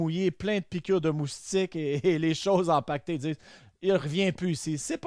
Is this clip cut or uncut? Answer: uncut